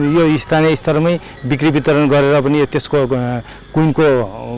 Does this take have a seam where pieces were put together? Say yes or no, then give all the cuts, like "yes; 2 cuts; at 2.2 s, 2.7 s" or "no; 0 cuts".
no; 0 cuts